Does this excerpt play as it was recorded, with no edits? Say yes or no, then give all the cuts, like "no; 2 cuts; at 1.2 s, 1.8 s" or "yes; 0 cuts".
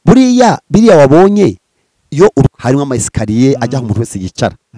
no; 1 cut; at 2.5 s